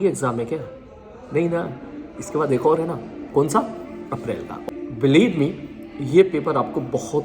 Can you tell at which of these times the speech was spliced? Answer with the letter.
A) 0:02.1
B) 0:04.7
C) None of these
B